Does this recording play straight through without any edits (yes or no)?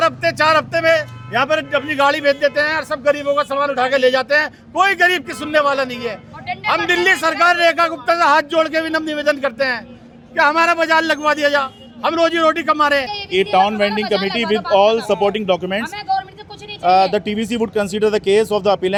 yes